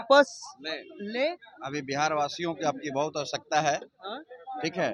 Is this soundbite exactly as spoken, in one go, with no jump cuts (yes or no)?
yes